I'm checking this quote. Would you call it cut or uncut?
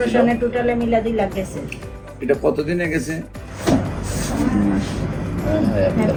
uncut